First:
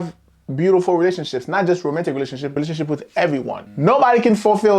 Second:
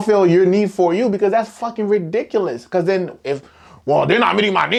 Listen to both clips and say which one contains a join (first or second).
first